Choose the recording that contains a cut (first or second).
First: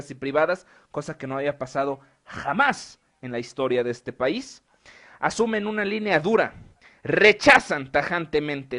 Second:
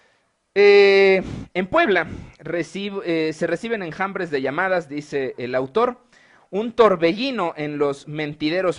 first